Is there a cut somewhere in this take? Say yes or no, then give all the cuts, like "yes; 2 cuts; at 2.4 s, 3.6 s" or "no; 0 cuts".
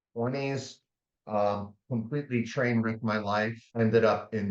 yes; 1 cut; at 3.6 s